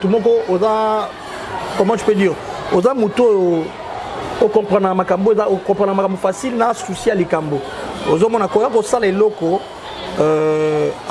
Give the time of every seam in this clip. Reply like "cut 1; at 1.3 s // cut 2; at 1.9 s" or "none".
none